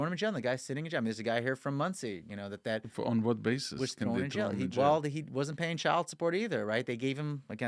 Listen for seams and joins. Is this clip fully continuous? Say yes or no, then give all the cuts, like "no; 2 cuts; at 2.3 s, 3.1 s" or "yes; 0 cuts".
yes; 0 cuts